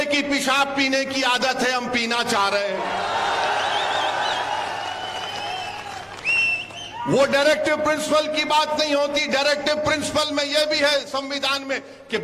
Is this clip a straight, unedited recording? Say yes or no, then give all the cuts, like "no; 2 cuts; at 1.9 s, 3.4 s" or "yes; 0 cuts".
yes; 0 cuts